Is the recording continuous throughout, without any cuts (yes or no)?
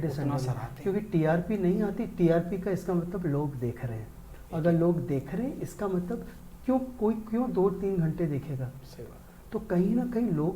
yes